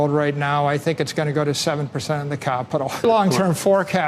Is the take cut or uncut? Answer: cut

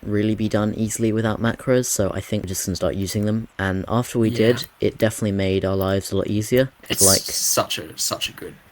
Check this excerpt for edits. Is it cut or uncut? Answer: cut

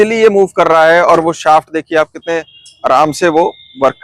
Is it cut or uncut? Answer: uncut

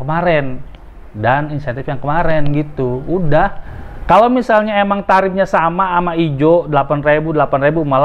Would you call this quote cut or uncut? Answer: cut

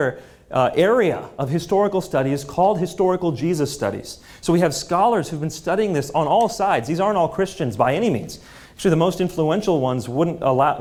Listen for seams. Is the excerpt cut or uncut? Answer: uncut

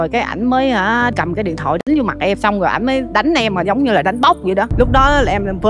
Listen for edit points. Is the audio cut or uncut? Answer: cut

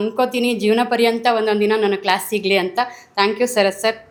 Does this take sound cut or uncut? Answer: uncut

